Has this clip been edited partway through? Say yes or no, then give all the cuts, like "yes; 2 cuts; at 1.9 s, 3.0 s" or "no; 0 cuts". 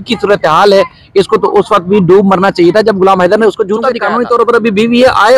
yes; 1 cut; at 4.0 s